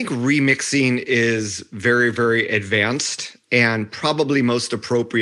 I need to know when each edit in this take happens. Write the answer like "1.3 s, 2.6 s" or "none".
none